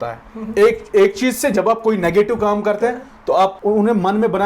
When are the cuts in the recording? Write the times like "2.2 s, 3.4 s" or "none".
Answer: 3.6 s